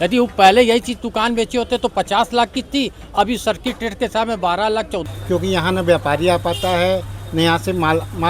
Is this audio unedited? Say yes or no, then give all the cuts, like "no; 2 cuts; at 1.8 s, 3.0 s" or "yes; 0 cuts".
no; 1 cut; at 5.0 s